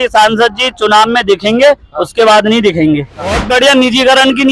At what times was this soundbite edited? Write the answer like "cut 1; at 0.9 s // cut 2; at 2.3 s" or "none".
cut 1; at 3.4 s